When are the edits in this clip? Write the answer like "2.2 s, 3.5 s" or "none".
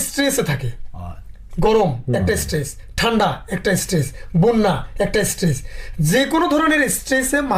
none